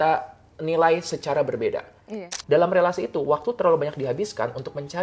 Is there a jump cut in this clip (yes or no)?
yes